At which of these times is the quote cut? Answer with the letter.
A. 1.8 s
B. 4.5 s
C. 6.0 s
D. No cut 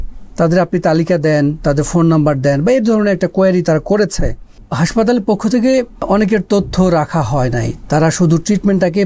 C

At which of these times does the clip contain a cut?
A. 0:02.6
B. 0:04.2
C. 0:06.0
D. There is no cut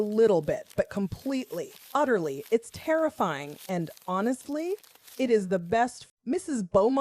C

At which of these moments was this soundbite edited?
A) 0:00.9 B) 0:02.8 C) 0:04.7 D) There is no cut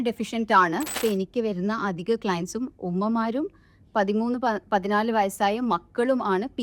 A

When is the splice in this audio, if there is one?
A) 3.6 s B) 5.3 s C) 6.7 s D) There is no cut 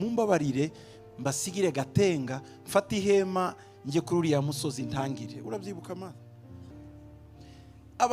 C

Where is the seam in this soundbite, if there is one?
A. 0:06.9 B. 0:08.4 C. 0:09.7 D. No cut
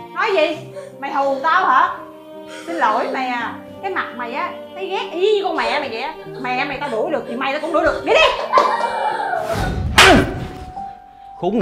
C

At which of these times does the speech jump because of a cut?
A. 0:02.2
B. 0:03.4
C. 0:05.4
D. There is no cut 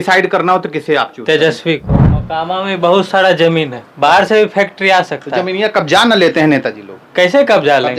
A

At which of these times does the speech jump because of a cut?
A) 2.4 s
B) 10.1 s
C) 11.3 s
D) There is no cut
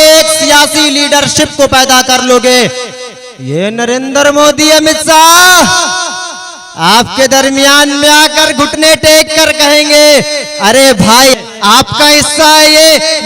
C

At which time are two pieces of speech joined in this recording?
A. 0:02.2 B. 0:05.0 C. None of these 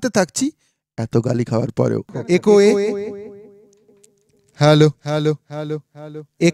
A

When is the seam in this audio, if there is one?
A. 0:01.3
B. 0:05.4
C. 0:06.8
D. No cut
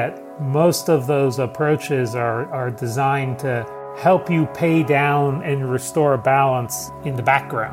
C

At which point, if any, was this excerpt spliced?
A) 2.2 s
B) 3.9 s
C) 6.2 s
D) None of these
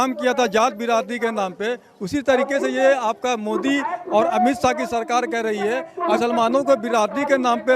C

